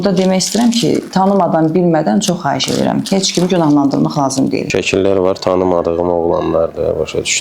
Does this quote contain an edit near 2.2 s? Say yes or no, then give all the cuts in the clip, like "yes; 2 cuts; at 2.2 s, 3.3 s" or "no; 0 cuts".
no; 1 cut; at 4.7 s